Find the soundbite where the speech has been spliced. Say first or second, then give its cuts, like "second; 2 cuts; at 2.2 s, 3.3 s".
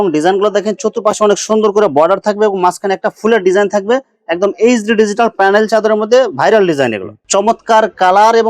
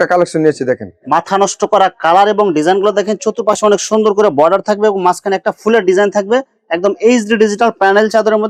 first; 1 cut; at 7.1 s